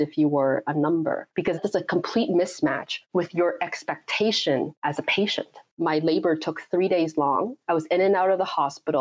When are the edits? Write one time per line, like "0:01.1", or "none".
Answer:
0:05.6